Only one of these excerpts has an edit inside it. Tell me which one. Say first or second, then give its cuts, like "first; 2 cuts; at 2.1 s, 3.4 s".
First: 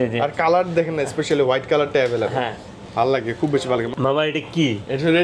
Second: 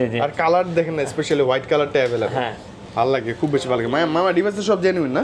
first; 1 cut; at 3.9 s